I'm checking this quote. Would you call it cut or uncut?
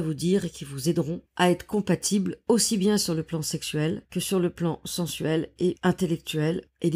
cut